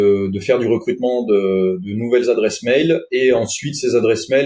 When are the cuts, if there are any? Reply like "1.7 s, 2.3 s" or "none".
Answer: none